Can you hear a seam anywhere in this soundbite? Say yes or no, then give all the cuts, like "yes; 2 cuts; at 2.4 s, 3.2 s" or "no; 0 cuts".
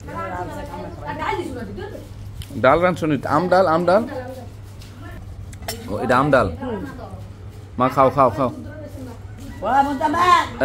no; 0 cuts